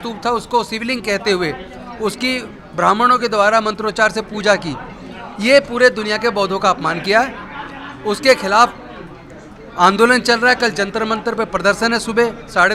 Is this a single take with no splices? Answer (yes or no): yes